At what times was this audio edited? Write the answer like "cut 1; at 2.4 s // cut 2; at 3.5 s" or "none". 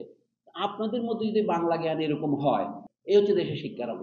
cut 1; at 2.9 s